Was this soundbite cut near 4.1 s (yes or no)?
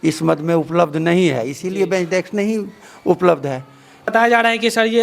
yes